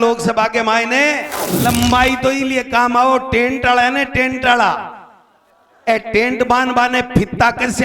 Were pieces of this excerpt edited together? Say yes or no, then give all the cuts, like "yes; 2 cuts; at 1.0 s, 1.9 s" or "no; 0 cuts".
yes; 1 cut; at 1.4 s